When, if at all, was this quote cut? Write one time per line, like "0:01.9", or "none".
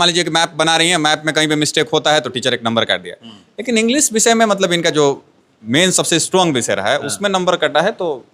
none

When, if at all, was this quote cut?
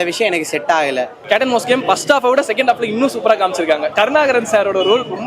0:01.2

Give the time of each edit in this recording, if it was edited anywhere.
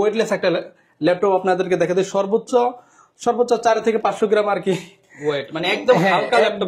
none

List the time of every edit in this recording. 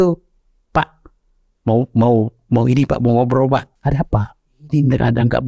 0:03.7

